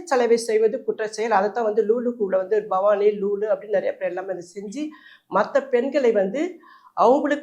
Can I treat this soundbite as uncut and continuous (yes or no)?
yes